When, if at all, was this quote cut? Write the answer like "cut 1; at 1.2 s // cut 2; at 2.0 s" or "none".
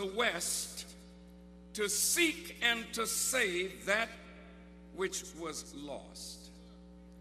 cut 1; at 3.2 s